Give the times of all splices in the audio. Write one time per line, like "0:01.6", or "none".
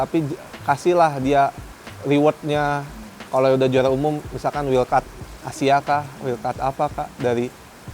none